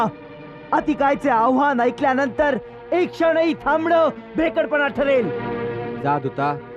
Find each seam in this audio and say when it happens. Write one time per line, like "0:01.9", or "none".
0:05.4